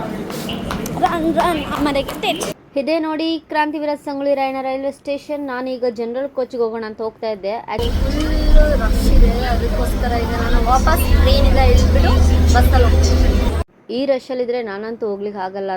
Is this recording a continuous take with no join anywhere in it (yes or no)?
no